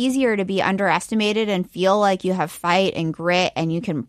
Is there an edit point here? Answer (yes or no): no